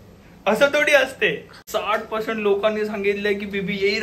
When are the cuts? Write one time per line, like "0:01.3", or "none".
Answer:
0:01.5